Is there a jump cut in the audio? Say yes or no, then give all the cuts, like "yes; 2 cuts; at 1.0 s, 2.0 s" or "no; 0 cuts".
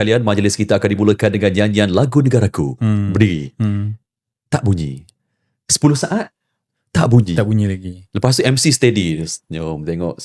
no; 0 cuts